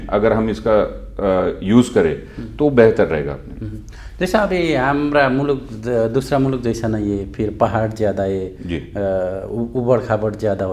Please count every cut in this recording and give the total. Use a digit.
0